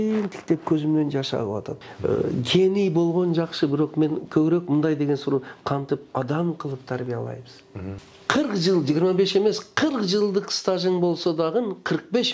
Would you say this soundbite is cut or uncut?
cut